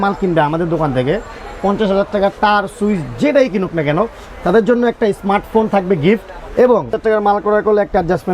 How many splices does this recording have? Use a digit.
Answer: 1